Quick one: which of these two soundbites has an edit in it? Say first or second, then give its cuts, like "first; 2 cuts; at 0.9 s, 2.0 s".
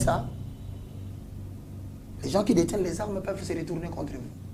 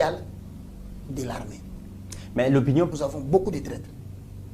second; 1 cut; at 2.9 s